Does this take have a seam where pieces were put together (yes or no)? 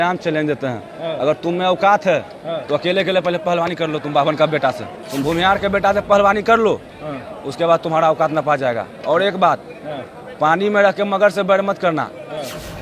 yes